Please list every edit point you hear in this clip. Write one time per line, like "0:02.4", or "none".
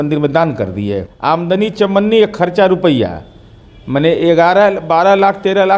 0:01.1